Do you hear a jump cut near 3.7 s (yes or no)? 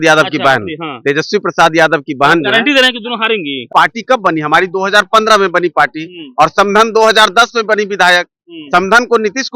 yes